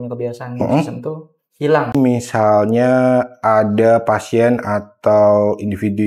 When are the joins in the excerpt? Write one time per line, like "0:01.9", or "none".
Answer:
0:01.9